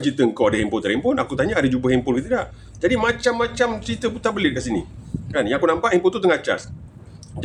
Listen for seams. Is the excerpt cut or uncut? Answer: uncut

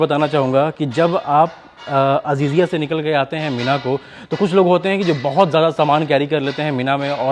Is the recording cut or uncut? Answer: uncut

